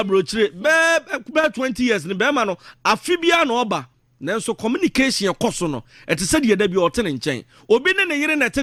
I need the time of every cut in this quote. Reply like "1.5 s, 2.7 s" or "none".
none